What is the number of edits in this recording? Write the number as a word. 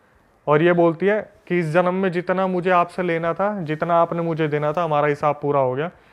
zero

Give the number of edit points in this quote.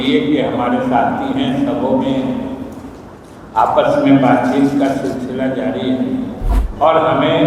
one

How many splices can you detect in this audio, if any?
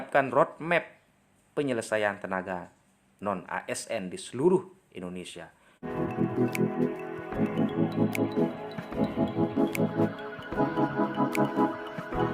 one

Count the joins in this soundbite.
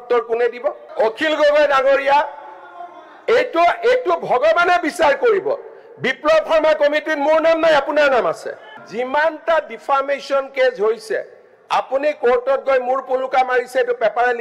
two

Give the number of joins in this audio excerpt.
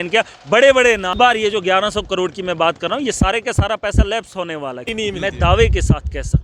two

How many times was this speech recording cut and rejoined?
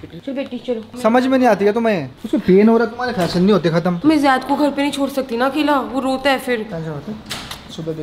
three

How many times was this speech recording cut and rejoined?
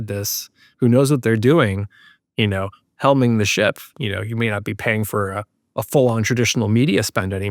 one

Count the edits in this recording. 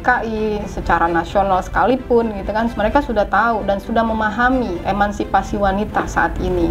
one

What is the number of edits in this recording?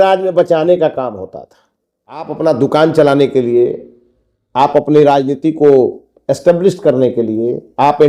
one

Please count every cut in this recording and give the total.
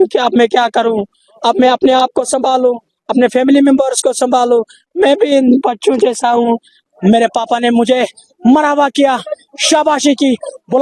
one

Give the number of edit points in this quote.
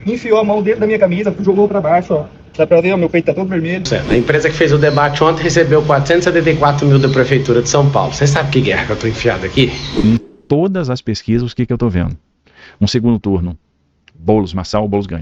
two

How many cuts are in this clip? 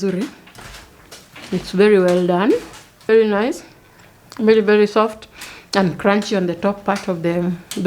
one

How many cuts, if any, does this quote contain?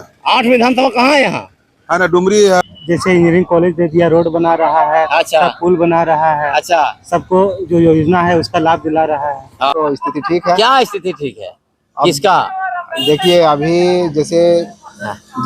two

